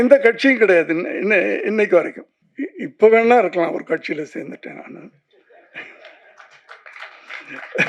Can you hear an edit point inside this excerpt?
no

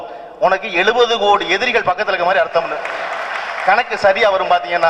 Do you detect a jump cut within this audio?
no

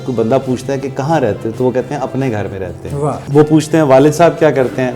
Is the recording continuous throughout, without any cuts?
no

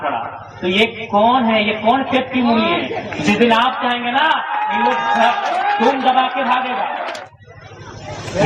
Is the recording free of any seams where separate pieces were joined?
no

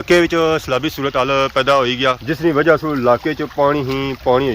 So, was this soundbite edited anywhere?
yes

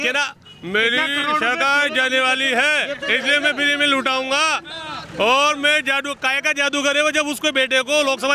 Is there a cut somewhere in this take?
no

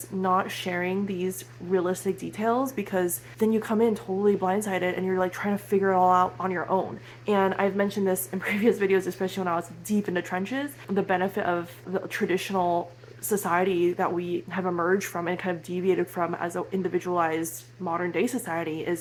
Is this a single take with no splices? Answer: yes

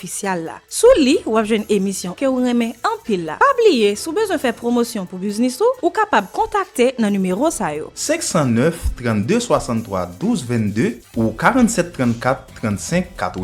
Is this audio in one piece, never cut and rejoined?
yes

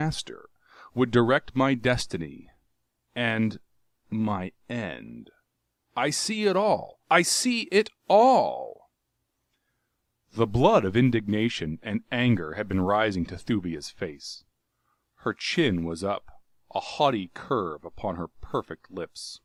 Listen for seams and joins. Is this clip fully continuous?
yes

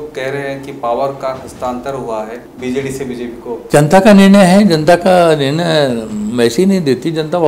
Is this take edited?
yes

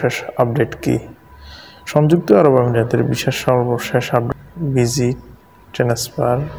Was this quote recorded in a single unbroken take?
no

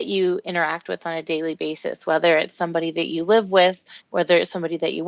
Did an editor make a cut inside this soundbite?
no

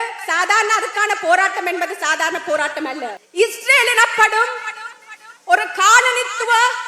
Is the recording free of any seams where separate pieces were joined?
no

